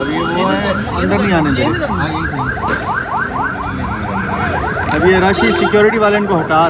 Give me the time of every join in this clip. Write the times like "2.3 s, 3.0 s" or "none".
none